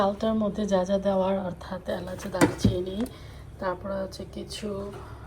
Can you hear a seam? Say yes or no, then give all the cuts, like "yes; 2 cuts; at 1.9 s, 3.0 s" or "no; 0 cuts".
no; 0 cuts